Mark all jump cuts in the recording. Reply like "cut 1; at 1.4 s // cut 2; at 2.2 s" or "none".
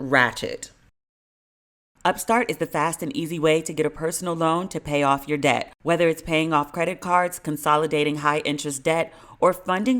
cut 1; at 1.8 s